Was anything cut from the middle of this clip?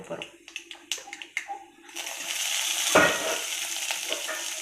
no; 0 cuts

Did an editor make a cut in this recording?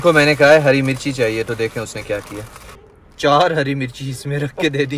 no; 0 cuts

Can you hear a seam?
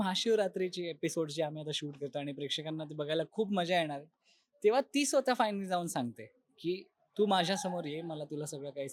no; 0 cuts

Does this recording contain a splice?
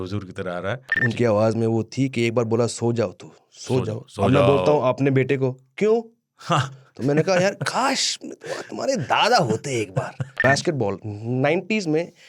yes; 2 cuts; at 1.0 s, 10.3 s

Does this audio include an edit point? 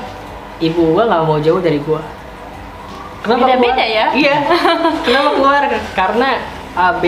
no; 0 cuts

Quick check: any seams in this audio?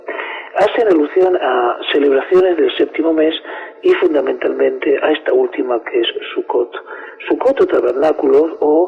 no; 0 cuts

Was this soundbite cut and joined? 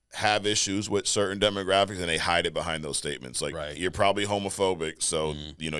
no; 0 cuts

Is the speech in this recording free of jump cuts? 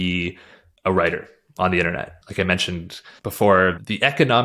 yes; 0 cuts

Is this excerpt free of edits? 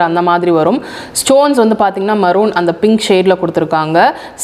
yes; 0 cuts

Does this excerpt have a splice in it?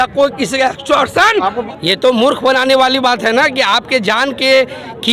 yes; 1 cut; at 1.6 s

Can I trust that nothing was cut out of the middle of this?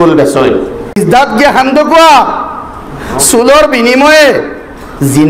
no; 1 cut; at 1.0 s

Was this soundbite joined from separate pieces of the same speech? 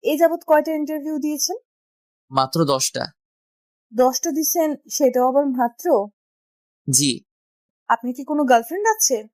yes; 1 cut; at 7.7 s

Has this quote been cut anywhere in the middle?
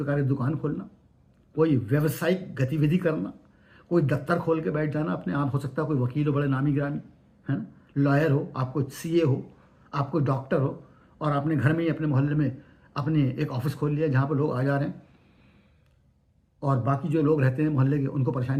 no; 0 cuts

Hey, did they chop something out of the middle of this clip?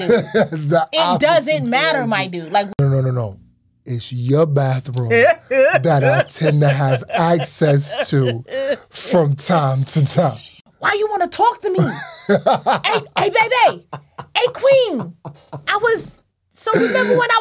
yes; 2 cuts; at 2.7 s, 10.5 s

